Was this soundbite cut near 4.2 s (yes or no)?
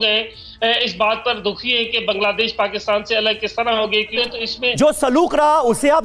yes